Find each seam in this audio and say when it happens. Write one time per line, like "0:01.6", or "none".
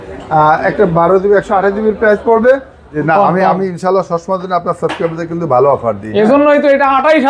0:03.0